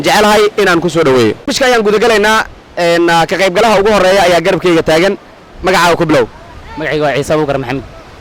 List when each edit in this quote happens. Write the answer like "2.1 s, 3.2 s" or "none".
1.5 s